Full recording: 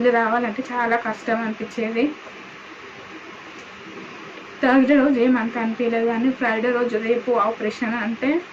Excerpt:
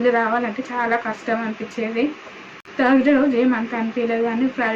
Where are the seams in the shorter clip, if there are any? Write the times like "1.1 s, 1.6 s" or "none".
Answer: 2.9 s

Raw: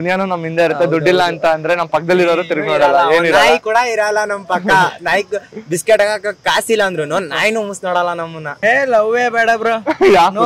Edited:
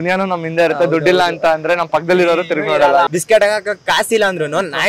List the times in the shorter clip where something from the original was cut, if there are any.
3.1 s

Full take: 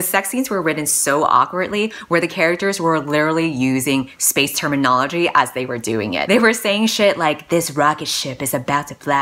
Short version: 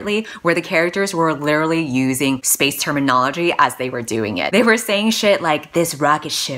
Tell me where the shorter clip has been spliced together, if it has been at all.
2.5 s

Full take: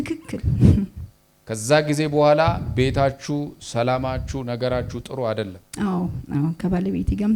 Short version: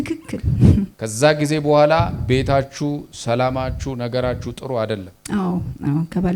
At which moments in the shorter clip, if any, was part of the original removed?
1.0 s

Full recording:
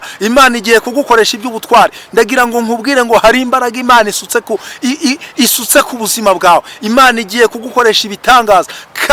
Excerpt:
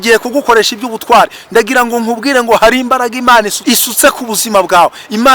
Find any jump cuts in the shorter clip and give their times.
3.5 s

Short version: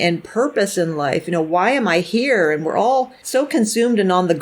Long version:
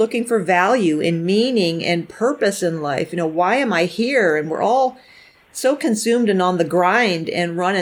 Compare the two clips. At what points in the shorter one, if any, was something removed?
3.2 s

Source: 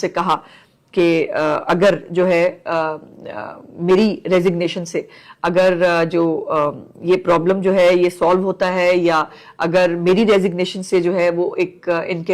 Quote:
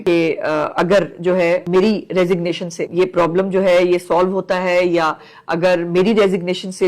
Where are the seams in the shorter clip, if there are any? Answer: 1.6 s, 2.8 s

